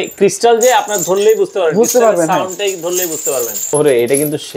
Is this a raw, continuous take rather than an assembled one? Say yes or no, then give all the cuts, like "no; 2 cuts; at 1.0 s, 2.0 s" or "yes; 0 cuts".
no; 1 cut; at 3.6 s